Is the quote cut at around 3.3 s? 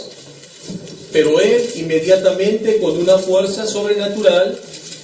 yes; 1 cut; at 3.3 s

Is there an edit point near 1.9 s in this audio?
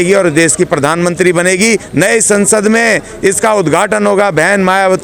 yes; 1 cut; at 1.9 s

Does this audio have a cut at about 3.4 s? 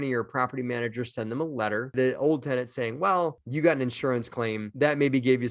yes; 2 cuts; at 1.9 s, 3.4 s

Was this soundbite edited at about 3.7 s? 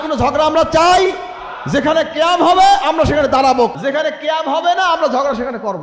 yes; 1 cut; at 3.7 s

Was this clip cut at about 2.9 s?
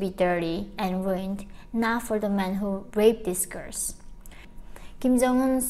no; 1 cut; at 4.5 s

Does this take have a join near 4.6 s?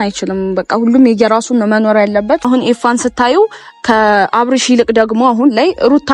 no; 1 cut; at 2.5 s

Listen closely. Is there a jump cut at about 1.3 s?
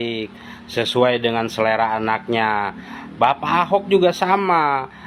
no; 0 cuts

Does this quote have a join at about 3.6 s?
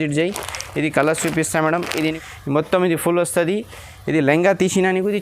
no; 1 cut; at 2.2 s

